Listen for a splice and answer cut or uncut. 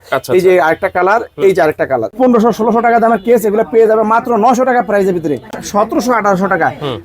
cut